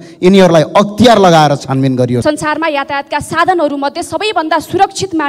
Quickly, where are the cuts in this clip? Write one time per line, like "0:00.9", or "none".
0:02.2